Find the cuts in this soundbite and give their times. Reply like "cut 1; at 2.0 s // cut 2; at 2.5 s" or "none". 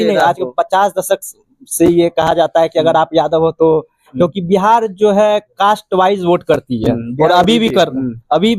none